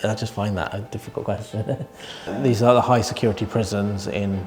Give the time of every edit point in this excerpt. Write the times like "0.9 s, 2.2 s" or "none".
2.0 s